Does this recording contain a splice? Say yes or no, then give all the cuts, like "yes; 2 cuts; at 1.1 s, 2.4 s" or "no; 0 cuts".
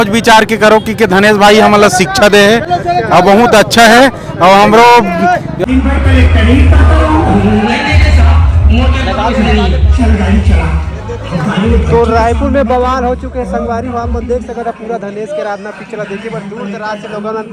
no; 0 cuts